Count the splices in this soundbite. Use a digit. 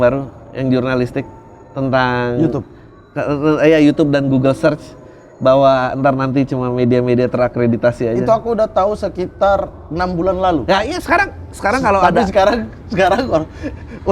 0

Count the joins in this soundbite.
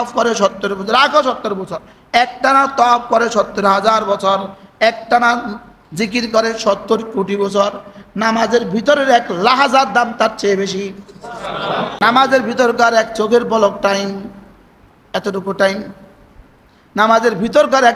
1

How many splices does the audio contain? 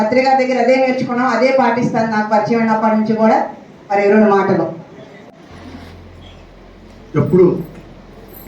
1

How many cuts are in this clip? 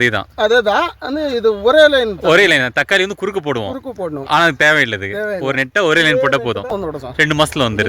1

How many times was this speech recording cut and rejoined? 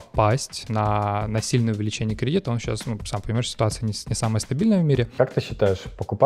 1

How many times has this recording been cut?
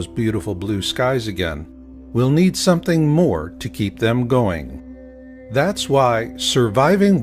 1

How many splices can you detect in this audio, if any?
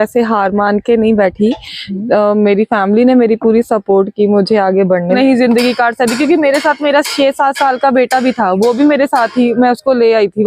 1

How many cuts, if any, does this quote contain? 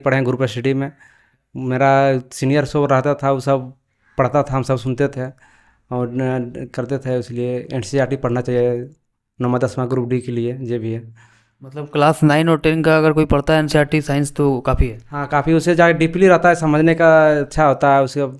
0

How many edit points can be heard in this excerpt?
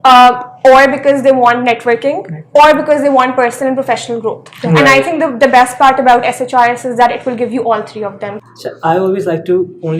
1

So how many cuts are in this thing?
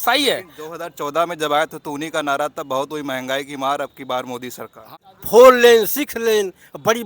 1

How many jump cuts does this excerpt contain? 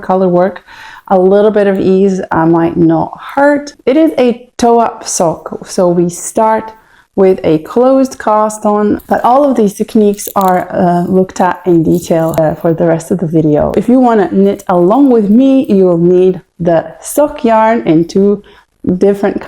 3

